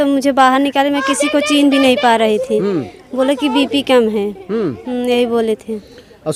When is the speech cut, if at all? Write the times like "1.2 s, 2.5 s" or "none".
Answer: none